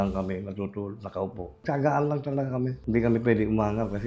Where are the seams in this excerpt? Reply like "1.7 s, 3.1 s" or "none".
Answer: 2.8 s